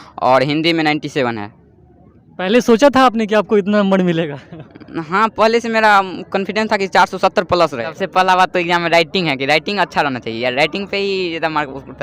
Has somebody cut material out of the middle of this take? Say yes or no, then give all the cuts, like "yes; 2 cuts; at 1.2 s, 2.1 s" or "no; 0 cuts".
yes; 1 cut; at 7.8 s